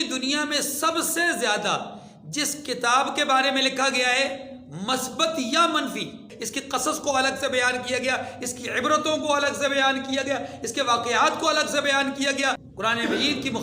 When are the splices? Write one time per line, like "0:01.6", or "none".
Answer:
0:06.5
0:12.7